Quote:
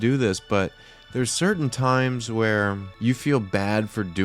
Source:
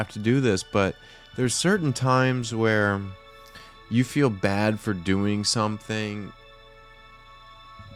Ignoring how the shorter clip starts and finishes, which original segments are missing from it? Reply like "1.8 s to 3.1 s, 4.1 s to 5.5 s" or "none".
3.1 s to 3.8 s